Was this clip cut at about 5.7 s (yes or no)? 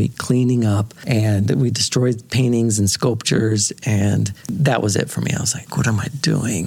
yes